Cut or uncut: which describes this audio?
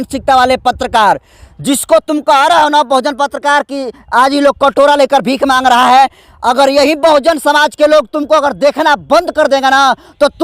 uncut